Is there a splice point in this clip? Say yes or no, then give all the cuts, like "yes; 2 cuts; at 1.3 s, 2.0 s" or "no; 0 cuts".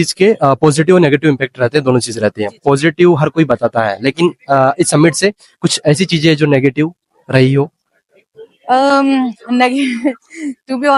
no; 0 cuts